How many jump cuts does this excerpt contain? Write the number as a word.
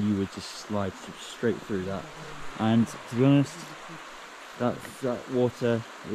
zero